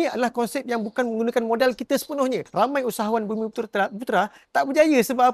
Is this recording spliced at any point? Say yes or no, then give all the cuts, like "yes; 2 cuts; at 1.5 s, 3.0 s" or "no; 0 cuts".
yes; 1 cut; at 2.4 s